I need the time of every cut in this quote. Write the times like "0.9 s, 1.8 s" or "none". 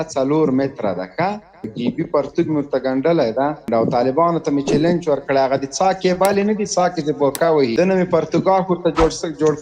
1.7 s, 3.7 s, 7.7 s

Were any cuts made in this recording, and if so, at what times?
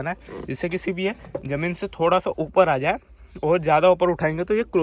none

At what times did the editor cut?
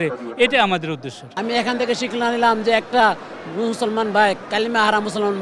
none

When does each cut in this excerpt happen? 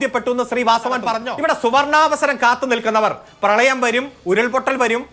1.1 s

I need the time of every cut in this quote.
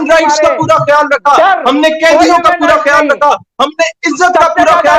none

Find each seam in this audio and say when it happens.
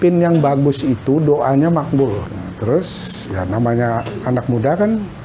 2.3 s

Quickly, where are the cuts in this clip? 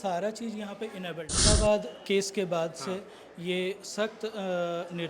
1.4 s

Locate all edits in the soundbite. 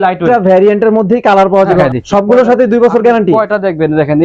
1.7 s

